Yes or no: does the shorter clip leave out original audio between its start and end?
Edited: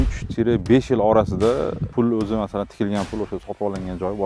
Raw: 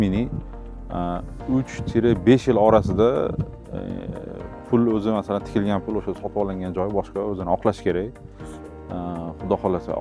yes